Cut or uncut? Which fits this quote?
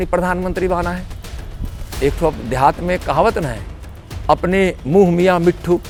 uncut